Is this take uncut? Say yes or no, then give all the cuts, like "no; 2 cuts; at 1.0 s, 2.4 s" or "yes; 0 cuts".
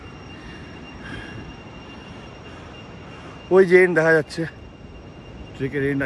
yes; 0 cuts